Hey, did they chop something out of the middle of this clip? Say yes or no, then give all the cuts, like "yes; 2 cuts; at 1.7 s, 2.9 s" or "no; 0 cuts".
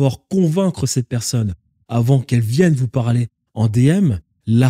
no; 0 cuts